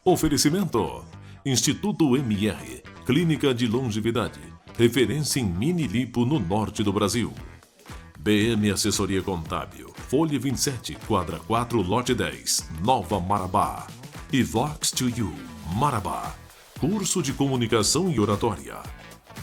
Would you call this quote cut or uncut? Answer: uncut